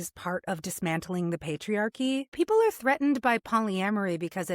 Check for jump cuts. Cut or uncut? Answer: cut